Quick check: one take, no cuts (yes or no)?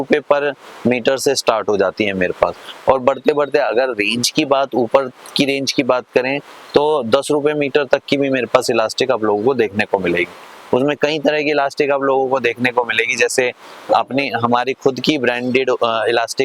yes